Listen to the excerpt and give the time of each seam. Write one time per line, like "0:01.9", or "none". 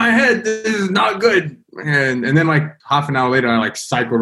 0:02.7